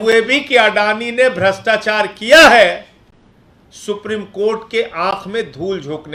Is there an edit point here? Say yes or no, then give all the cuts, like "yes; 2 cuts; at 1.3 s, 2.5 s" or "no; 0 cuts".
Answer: no; 0 cuts